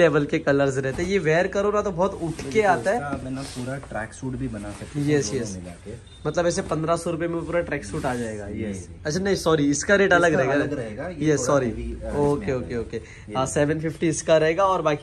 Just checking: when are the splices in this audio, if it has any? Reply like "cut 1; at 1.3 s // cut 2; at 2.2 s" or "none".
none